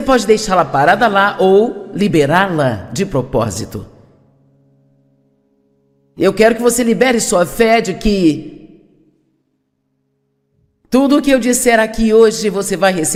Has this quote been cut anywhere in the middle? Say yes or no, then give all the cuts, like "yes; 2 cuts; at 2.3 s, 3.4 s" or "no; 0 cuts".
no; 0 cuts